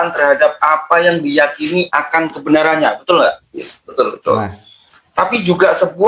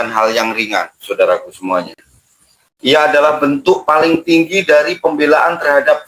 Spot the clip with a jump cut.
first; 1 cut; at 3.4 s

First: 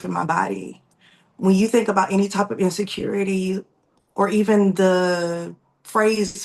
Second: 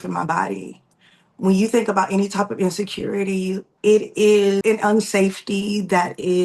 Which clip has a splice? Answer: second; 2 cuts; at 3.7 s, 4.6 s

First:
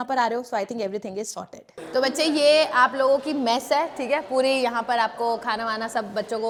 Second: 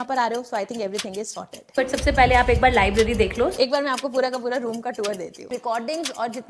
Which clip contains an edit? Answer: second; 3 cuts; at 1.8 s, 3.5 s, 5.5 s

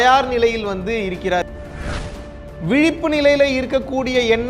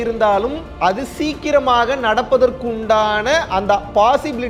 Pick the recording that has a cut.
first; 1 cut; at 2.1 s

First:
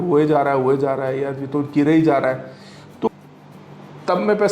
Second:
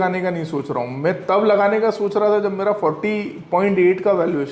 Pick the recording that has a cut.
first; 1 cut; at 3.1 s

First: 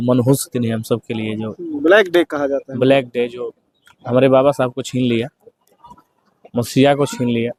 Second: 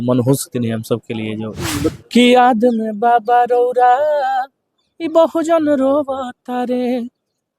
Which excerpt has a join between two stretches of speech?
second; 1 cut; at 1.9 s

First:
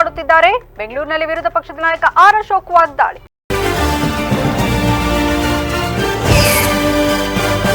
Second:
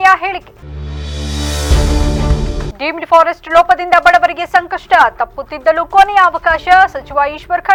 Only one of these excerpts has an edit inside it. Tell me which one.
first; 1 cut; at 3.3 s

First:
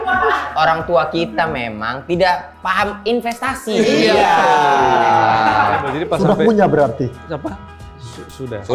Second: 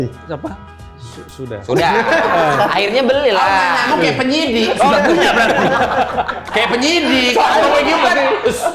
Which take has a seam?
first; 1 cut; at 6.0 s

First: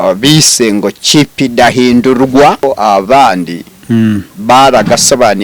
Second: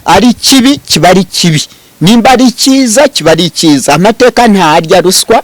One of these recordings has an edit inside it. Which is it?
first; 1 cut; at 2.6 s

